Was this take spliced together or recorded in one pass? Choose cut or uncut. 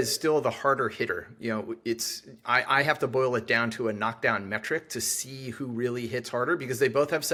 uncut